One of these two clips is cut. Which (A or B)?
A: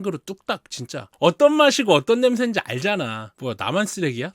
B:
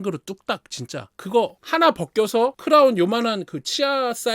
A